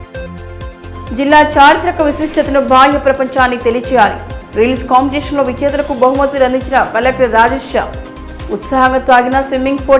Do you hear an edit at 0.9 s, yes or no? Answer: yes